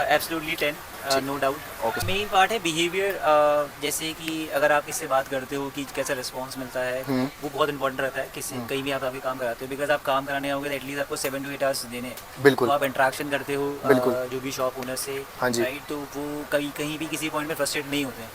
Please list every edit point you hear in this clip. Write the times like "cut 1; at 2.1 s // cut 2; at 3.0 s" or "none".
cut 1; at 2.0 s